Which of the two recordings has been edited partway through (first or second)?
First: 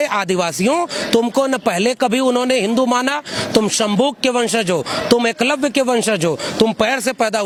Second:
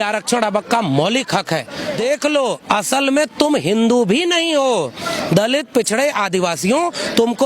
second